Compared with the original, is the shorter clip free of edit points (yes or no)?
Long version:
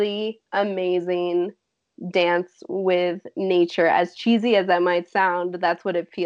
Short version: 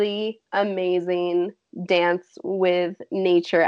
no